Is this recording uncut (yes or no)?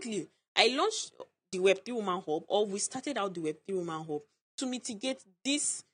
yes